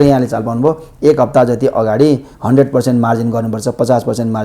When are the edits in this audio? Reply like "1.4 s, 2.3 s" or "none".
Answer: 2.3 s